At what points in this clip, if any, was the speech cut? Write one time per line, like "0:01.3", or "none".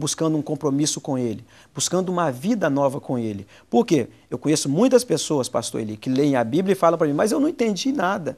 none